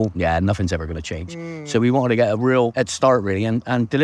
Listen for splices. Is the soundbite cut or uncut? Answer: cut